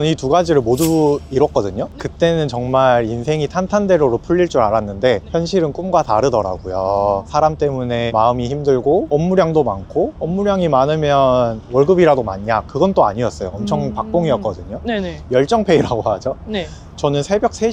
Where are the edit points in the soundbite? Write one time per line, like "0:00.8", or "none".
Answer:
none